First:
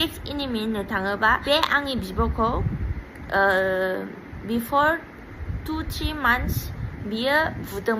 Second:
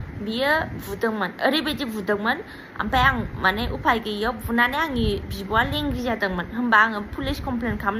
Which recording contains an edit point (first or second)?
first